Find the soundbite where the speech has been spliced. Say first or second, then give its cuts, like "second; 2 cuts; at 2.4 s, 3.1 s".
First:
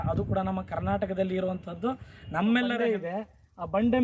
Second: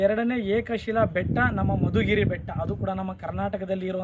first; 1 cut; at 2.8 s